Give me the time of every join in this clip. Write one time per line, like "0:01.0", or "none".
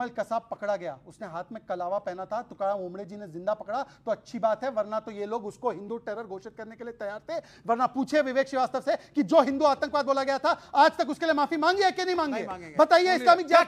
none